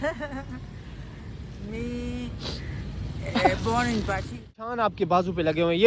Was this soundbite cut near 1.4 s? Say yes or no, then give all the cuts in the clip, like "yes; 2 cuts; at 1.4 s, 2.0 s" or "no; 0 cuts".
no; 1 cut; at 4.8 s